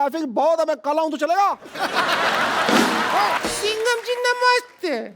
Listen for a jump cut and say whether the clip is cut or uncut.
cut